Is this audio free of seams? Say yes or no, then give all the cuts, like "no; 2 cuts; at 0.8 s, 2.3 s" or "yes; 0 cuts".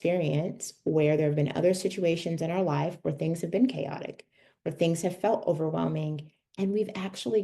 yes; 0 cuts